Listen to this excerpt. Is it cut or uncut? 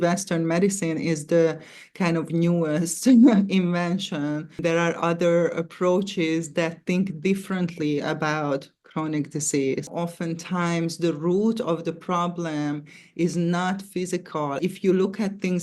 cut